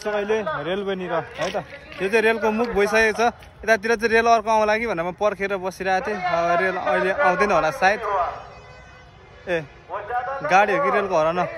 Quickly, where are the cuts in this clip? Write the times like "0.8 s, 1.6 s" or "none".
none